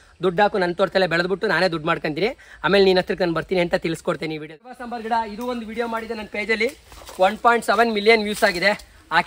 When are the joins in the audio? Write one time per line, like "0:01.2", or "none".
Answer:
0:04.4